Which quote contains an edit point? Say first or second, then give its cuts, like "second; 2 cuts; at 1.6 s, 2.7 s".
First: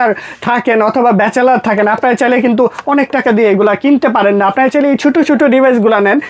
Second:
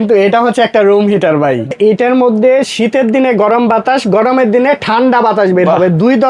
second; 1 cut; at 1.7 s